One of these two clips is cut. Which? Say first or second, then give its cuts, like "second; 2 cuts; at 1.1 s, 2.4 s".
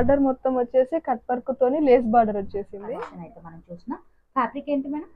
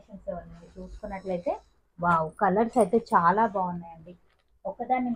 first; 1 cut; at 2.8 s